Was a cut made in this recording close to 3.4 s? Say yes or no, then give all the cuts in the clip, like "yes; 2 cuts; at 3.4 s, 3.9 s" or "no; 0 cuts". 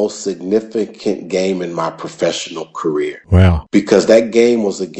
yes; 1 cut; at 3.4 s